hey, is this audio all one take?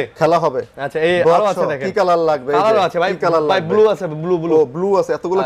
yes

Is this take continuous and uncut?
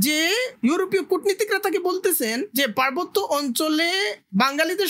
yes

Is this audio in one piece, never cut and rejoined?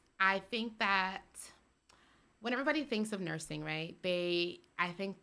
yes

